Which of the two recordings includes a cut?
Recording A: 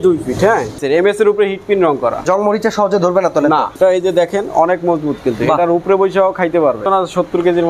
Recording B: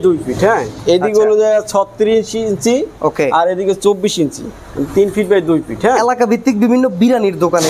A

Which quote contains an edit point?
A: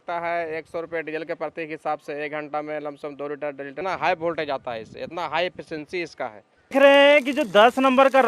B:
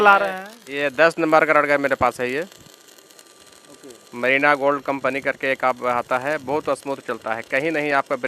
A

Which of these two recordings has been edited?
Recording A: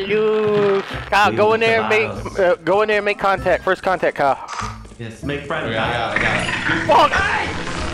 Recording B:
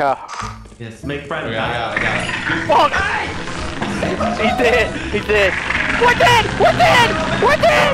A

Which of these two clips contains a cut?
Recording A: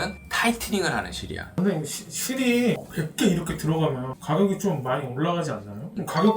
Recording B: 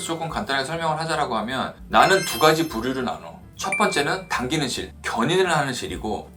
A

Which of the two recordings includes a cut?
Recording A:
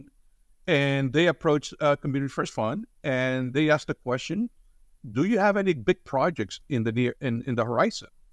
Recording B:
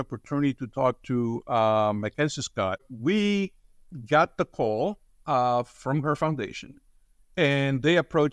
B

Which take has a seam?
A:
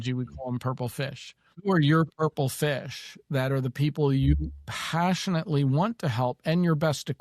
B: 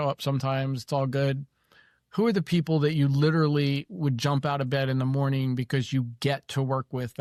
A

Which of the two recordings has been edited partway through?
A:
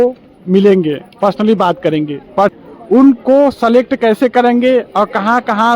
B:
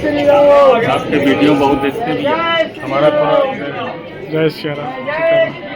A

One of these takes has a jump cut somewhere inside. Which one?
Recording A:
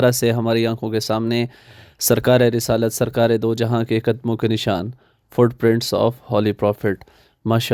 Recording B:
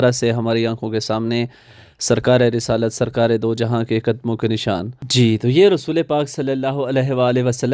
B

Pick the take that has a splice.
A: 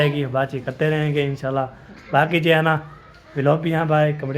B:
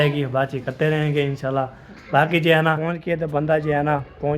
B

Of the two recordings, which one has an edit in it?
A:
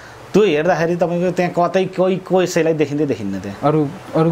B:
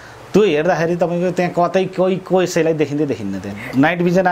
B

